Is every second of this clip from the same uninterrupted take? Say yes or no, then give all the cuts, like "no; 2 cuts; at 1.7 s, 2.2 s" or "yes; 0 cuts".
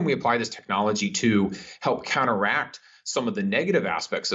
yes; 0 cuts